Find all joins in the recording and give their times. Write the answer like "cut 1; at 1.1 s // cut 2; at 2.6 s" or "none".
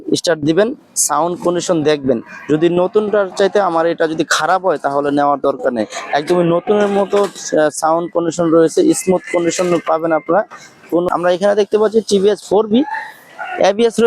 cut 1; at 11.1 s

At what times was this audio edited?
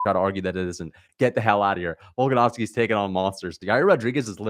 cut 1; at 3.6 s

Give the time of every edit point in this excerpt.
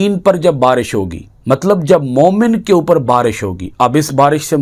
none

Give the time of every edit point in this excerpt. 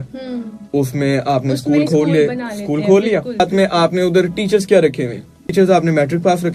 cut 1; at 3.4 s // cut 2; at 5.4 s

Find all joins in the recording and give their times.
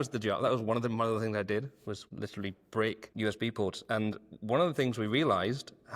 cut 1; at 2.0 s // cut 2; at 3.1 s

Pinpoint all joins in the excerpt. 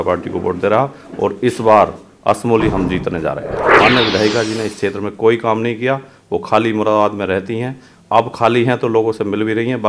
cut 1; at 3.8 s

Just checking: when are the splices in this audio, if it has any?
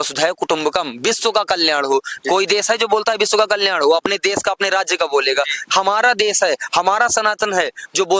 none

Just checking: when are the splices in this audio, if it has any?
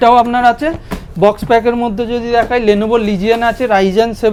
none

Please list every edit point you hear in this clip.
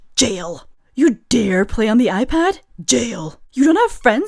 none

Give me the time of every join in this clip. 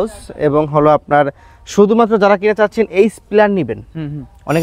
none

